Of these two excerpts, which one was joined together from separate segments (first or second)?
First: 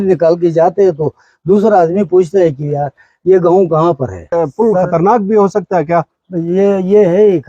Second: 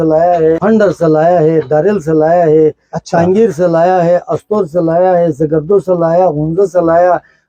first